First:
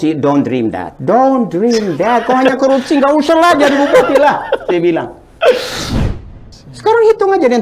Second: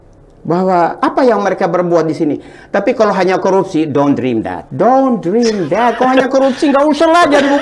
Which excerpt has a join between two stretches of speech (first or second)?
first